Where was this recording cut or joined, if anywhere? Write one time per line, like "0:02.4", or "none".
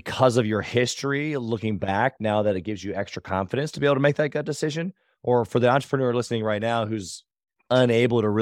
none